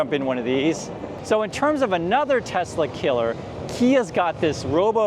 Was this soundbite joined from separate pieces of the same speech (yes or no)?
yes